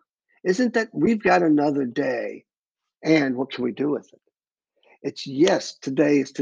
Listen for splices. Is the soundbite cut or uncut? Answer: uncut